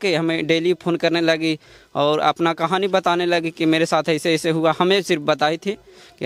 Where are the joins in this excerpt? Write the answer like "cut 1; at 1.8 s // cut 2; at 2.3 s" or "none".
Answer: none